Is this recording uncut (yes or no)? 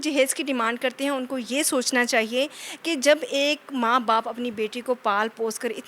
yes